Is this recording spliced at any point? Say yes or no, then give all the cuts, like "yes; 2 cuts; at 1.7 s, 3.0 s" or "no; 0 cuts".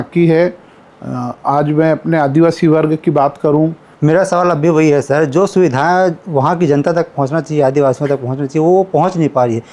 yes; 1 cut; at 3.9 s